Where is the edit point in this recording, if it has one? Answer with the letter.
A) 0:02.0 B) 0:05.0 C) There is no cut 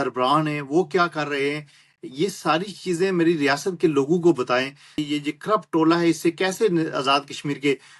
B